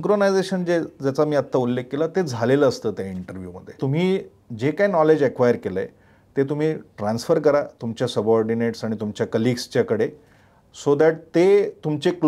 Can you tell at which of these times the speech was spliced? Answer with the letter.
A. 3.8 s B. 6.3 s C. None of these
A